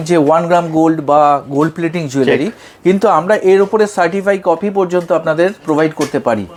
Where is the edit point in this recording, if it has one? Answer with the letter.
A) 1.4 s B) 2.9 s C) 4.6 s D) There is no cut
D